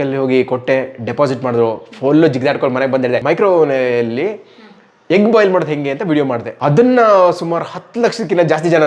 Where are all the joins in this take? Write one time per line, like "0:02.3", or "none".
0:03.2
0:06.5